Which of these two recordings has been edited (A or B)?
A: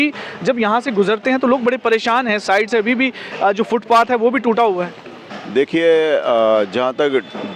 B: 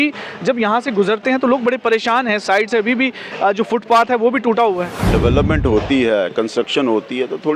B